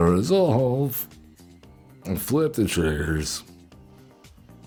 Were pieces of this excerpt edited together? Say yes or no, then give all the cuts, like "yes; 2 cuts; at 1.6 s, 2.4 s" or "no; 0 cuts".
no; 0 cuts